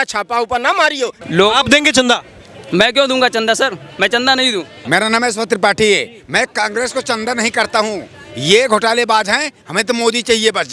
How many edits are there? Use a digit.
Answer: 2